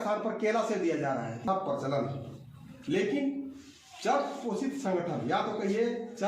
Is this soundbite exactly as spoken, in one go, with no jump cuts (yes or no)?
no